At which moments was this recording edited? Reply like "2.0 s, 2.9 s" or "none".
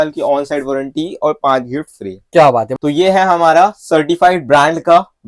2.7 s